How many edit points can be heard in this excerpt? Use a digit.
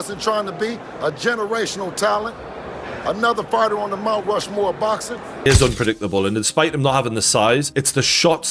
1